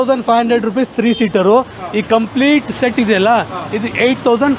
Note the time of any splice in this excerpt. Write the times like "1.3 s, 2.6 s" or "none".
none